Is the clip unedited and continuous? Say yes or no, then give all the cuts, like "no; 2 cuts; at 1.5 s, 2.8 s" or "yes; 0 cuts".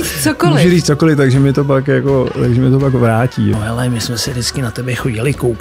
no; 1 cut; at 3.5 s